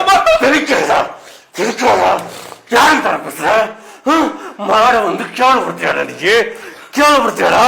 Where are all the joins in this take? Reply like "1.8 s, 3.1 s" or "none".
none